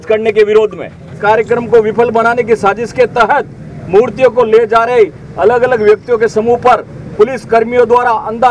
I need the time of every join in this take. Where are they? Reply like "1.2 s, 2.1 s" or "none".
1.1 s